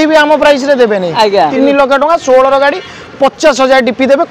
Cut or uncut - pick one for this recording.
cut